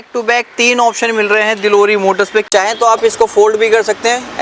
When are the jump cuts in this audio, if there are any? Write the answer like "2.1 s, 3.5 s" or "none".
2.4 s